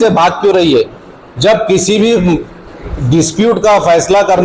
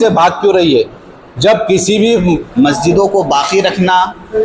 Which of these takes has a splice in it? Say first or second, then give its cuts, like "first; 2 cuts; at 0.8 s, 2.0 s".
second; 1 cut; at 2.5 s